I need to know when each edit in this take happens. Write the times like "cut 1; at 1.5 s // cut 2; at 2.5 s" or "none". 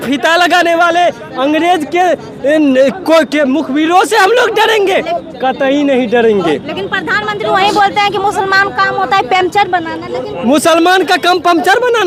none